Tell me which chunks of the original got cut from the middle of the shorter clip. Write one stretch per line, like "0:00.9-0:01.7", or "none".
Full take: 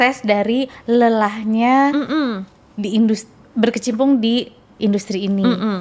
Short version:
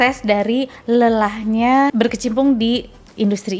0:01.9-0:03.5